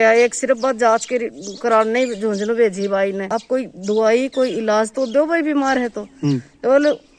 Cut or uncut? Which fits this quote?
cut